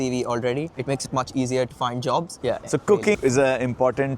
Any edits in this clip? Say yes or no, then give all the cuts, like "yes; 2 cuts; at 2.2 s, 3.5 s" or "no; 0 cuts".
yes; 2 cuts; at 2.3 s, 3.2 s